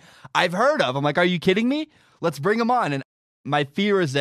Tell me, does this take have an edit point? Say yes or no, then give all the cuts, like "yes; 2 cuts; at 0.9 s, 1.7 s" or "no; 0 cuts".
yes; 1 cut; at 3.3 s